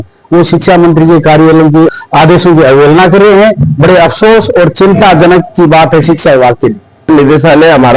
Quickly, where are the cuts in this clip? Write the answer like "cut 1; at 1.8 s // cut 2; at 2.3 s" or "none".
cut 1; at 1.9 s // cut 2; at 7.1 s

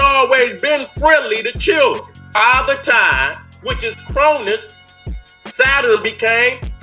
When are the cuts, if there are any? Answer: cut 1; at 2.2 s

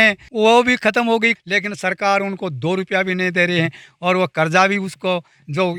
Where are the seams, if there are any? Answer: none

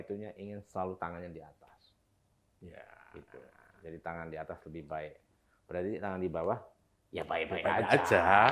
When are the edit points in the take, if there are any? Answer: none

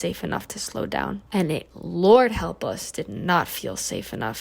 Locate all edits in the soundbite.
cut 1; at 1.2 s

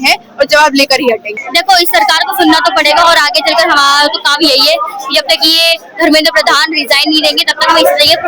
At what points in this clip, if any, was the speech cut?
cut 1; at 1.3 s

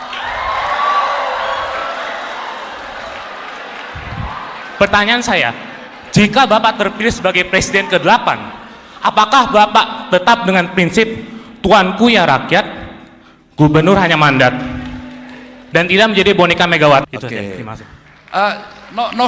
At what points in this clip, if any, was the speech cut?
cut 1; at 17.1 s

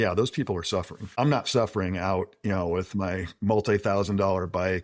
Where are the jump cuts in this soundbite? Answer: cut 1; at 1.0 s

